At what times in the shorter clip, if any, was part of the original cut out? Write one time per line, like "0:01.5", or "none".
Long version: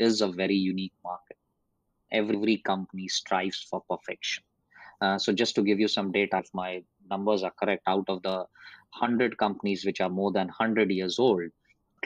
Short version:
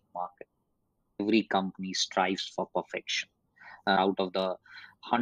0:01.2
0:04.0